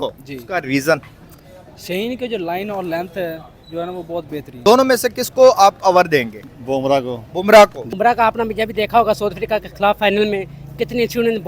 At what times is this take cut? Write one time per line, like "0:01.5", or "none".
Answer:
0:04.6
0:07.8